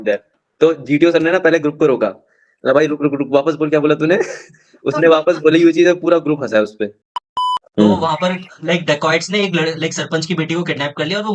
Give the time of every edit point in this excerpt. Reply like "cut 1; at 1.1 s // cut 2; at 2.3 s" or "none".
cut 1; at 7.4 s